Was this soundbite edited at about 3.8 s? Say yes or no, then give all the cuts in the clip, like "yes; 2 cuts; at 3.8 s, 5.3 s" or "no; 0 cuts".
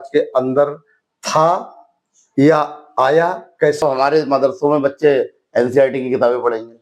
yes; 1 cut; at 3.8 s